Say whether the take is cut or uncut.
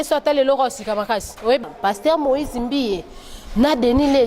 cut